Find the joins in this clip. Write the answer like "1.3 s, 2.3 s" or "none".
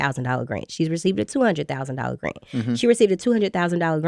none